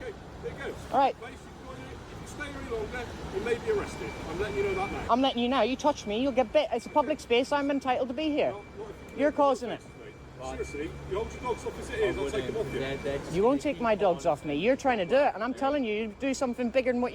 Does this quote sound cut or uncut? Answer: uncut